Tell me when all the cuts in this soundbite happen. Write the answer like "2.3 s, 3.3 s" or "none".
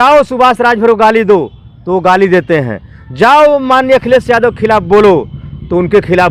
none